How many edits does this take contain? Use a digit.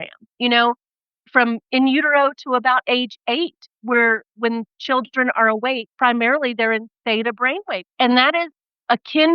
2